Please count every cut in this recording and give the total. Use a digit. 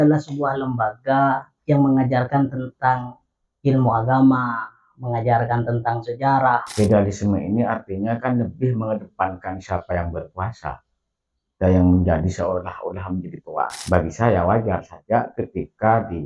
2